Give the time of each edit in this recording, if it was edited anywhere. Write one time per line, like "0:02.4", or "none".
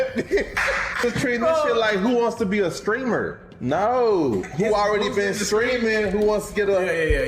0:01.0